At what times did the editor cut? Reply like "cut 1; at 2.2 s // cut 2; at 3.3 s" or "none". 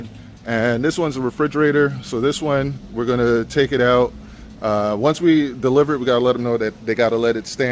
none